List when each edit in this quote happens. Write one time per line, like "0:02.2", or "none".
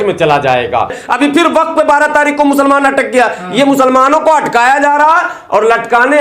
0:01.0